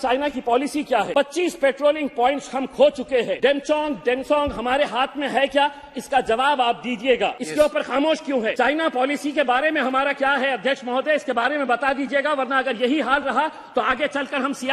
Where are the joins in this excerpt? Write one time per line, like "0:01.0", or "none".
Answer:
0:01.1
0:03.3
0:07.4
0:08.5